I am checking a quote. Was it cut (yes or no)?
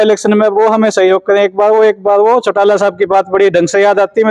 no